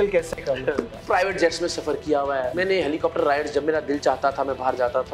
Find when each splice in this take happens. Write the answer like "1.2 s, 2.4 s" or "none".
1.0 s, 2.5 s